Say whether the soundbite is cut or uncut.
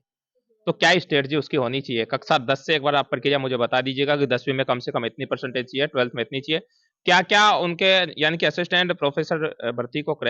uncut